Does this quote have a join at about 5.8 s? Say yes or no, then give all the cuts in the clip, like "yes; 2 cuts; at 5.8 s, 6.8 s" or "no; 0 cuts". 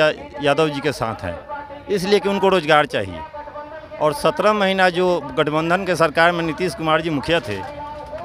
no; 0 cuts